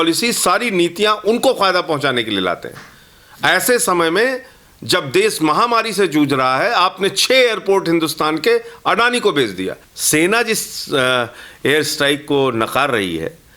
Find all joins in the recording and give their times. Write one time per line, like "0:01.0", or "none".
0:09.8

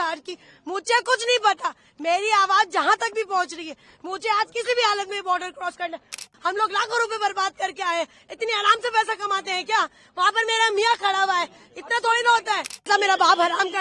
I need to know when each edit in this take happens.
0:06.2
0:12.9

